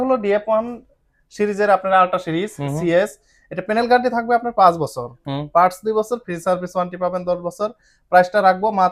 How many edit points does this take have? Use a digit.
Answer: 0